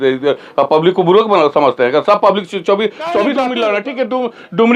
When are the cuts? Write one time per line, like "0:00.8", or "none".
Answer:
0:03.5